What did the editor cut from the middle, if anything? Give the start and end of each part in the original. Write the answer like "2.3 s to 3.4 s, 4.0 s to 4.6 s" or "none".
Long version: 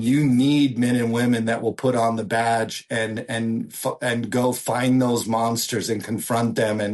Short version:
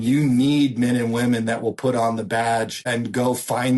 2.8 s to 4.0 s